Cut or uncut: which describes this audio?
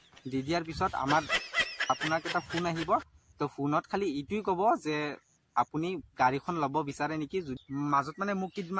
cut